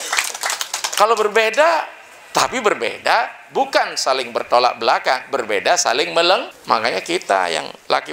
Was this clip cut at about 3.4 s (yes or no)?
no